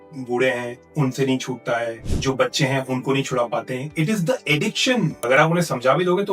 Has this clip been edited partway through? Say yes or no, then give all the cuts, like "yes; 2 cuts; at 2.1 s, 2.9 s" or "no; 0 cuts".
yes; 2 cuts; at 2.1 s, 5.2 s